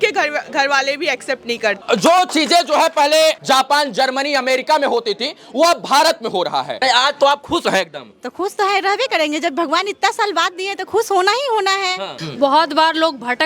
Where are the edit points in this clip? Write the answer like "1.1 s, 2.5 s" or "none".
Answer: 1.8 s, 3.4 s, 6.8 s, 12.2 s